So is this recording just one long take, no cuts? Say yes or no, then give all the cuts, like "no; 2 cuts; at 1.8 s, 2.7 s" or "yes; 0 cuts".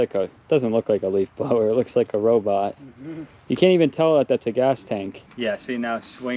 no; 1 cut; at 5.2 s